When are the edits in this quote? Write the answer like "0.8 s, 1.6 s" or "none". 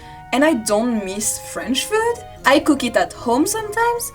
2.3 s